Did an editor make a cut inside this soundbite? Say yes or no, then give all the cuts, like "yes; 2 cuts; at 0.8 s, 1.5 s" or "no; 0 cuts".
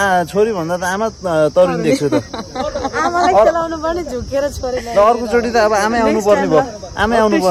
no; 0 cuts